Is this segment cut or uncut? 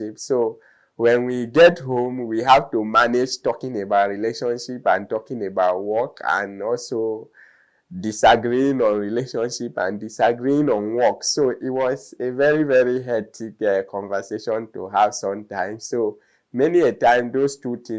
uncut